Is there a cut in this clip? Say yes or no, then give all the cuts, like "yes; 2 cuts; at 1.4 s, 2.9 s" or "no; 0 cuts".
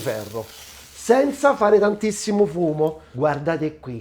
yes; 1 cut; at 3.1 s